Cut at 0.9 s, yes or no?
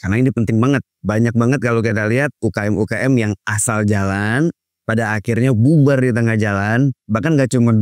yes